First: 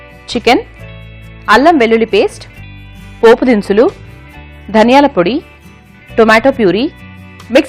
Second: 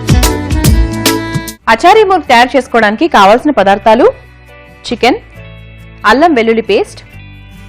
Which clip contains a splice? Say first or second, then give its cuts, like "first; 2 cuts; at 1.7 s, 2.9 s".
second; 1 cut; at 1.5 s